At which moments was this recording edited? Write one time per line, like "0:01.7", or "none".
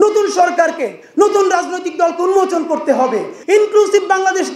0:03.3